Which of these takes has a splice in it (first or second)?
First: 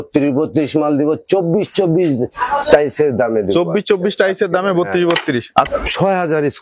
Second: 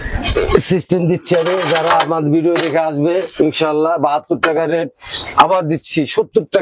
first